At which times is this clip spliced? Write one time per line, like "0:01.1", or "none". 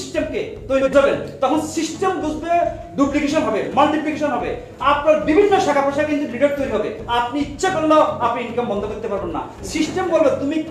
0:00.9